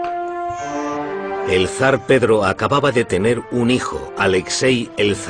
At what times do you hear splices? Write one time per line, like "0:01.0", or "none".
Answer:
0:03.1